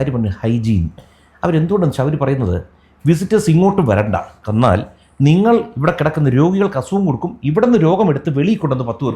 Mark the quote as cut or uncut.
uncut